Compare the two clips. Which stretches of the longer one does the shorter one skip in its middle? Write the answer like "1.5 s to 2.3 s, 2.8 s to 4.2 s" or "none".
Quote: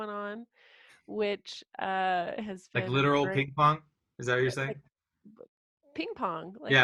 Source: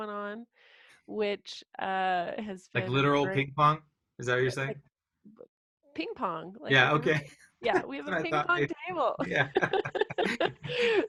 none